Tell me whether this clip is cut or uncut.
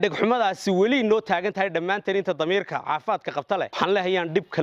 cut